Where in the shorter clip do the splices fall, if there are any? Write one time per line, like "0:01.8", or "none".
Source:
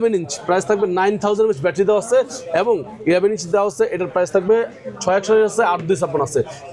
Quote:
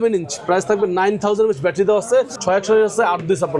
0:02.4